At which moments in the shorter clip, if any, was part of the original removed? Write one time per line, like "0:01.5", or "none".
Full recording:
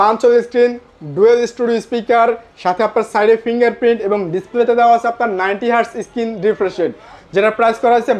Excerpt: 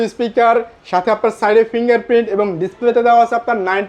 none